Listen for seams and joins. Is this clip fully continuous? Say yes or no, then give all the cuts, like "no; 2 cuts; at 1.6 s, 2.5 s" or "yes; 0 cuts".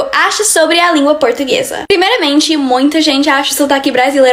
yes; 0 cuts